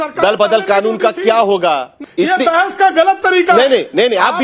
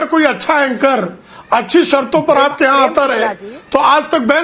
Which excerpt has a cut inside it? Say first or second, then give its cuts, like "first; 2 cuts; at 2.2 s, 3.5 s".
first; 1 cut; at 2.0 s